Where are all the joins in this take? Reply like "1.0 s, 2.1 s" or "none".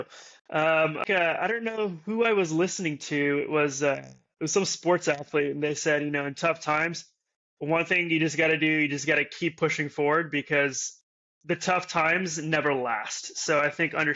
1.0 s

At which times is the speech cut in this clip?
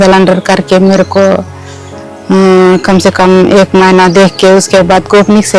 none

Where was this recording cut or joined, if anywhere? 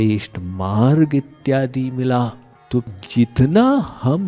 2.9 s

